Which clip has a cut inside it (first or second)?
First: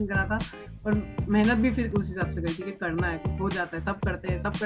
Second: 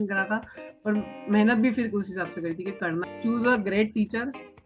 second